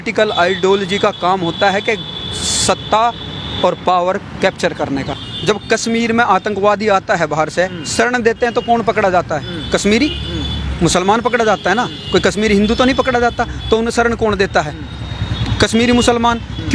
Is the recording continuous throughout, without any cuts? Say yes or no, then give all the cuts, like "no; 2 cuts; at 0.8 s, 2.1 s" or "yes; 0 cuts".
no; 1 cut; at 5.2 s